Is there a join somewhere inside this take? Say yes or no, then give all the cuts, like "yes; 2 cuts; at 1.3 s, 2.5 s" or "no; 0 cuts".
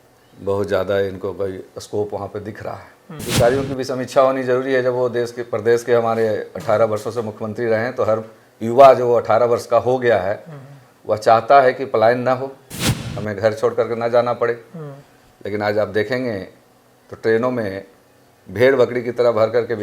yes; 1 cut; at 3.1 s